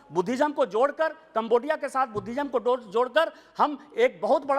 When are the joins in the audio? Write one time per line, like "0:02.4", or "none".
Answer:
none